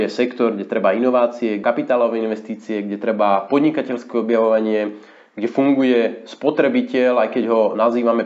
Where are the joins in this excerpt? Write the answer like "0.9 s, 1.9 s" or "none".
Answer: 1.6 s